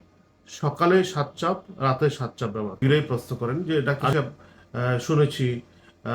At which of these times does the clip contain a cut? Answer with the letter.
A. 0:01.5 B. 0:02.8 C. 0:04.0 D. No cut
B